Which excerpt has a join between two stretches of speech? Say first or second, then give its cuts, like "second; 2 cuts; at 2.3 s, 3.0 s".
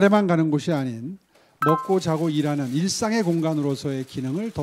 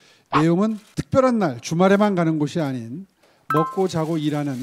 second; 1 cut; at 0.9 s